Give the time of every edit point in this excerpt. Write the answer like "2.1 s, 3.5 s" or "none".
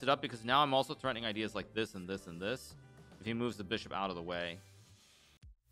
none